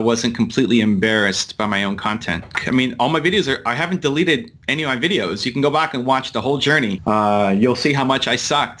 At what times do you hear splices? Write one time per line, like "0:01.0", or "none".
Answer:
0:02.5
0:07.0